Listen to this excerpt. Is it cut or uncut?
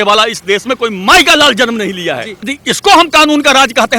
cut